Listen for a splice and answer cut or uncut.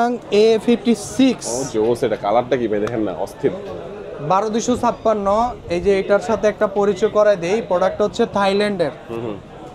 uncut